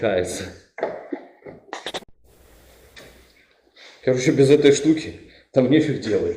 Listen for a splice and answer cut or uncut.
cut